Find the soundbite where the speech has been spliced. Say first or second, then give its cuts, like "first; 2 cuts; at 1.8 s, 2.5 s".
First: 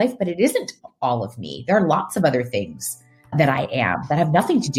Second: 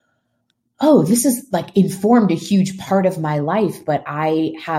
first; 1 cut; at 3.3 s